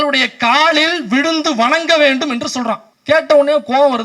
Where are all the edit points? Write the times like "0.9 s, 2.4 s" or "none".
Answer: 2.9 s